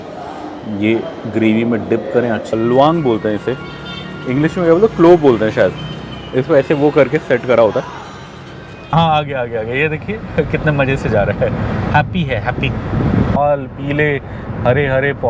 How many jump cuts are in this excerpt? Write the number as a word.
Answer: three